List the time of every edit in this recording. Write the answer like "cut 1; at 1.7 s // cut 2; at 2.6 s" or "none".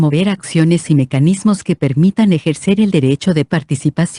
none